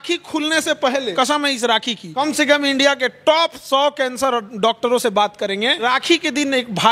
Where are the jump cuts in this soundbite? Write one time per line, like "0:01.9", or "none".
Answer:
0:01.1
0:02.0
0:05.9